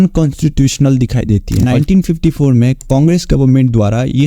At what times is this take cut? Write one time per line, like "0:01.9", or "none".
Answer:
0:01.6